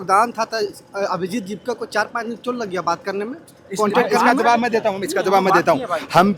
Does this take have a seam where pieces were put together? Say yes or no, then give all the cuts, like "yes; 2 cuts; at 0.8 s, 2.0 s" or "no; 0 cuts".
no; 0 cuts